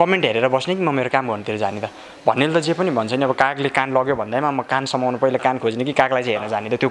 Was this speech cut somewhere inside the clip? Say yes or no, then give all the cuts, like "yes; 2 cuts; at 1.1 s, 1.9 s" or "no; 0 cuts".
no; 0 cuts